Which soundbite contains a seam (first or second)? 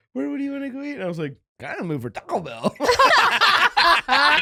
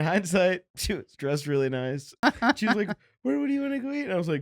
second